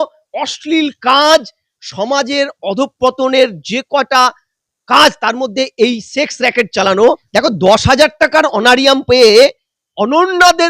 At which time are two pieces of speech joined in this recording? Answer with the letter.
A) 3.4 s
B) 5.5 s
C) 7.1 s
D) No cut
C